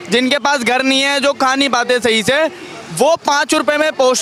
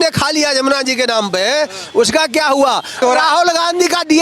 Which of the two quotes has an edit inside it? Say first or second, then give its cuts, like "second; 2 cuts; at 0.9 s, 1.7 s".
second; 1 cut; at 3.0 s